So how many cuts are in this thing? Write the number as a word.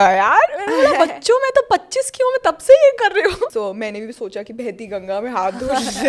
one